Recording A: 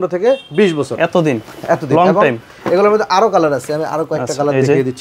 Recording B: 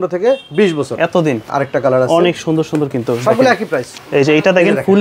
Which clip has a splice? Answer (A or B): B